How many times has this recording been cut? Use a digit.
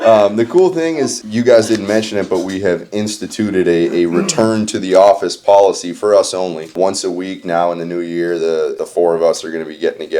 1